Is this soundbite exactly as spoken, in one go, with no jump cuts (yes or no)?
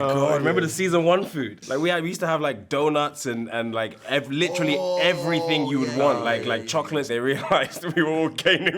no